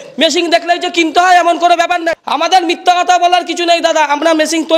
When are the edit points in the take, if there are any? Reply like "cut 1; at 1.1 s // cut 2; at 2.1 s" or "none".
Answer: cut 1; at 2.1 s